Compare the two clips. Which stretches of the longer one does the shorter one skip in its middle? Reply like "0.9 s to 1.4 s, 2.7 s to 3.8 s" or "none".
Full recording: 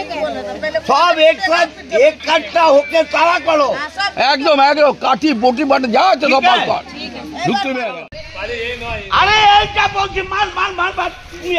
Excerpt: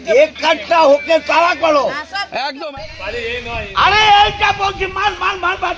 4.4 s to 7.9 s